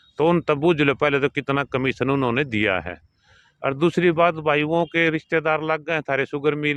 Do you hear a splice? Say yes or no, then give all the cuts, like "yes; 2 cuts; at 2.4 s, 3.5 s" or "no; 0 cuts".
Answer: no; 0 cuts